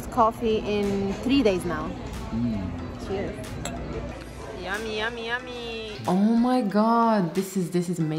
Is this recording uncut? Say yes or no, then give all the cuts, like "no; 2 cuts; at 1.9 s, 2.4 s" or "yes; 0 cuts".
no; 2 cuts; at 4.1 s, 6.0 s